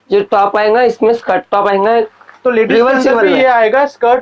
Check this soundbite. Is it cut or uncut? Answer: uncut